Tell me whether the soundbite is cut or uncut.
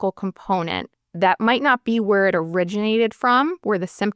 uncut